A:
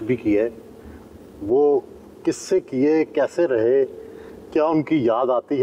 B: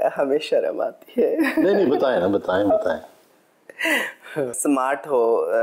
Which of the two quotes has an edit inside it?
B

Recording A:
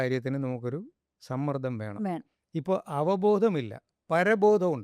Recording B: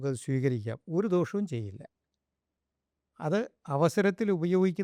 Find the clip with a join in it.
A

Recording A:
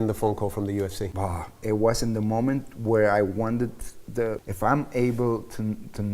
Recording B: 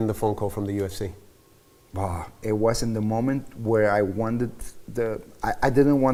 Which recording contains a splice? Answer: A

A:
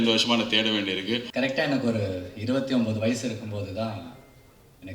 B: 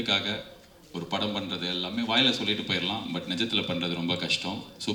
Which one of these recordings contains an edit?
A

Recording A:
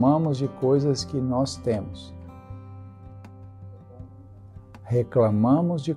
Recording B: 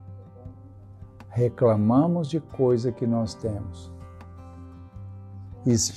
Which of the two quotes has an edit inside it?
B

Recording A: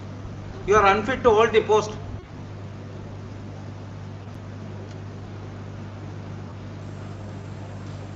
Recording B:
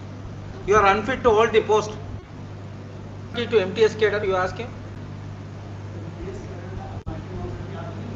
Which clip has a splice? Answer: B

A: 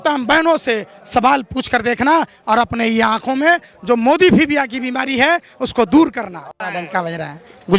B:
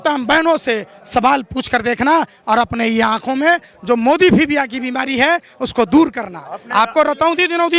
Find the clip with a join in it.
A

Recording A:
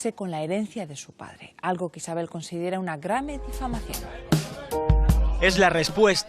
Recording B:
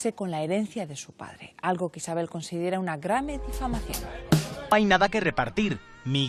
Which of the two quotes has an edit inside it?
A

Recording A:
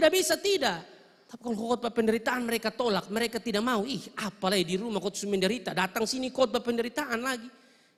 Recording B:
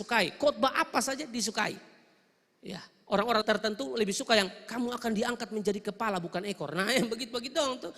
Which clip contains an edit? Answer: B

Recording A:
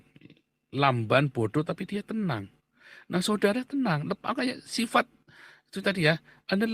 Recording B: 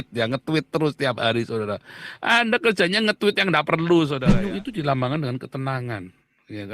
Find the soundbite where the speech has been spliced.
B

